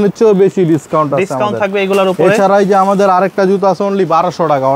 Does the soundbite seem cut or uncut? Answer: uncut